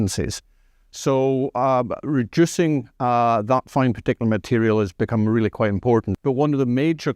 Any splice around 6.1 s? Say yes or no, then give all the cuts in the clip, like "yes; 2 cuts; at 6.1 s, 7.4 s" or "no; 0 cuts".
yes; 1 cut; at 6.1 s